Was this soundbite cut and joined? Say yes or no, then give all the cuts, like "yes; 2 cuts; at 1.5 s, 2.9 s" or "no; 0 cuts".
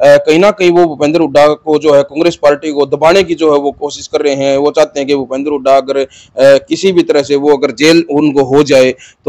no; 0 cuts